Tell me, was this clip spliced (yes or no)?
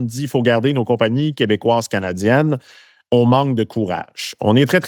no